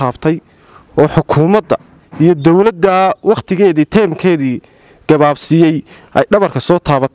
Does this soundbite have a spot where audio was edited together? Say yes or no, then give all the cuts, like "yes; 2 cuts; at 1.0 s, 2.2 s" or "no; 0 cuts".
no; 0 cuts